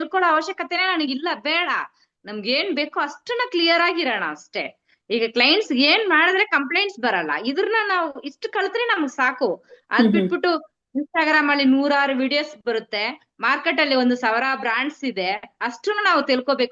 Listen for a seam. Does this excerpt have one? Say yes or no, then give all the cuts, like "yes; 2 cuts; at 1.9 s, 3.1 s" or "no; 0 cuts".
no; 0 cuts